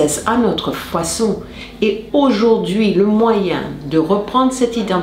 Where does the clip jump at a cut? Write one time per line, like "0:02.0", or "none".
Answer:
0:01.6